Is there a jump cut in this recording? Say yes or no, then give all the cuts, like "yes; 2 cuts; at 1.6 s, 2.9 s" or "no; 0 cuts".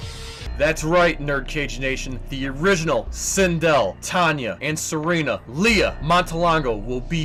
no; 0 cuts